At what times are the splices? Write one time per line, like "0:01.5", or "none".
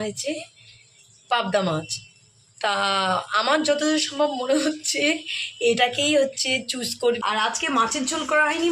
0:07.2